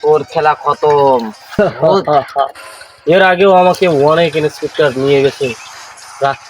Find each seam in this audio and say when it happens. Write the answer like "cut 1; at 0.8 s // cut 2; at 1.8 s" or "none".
cut 1; at 1.4 s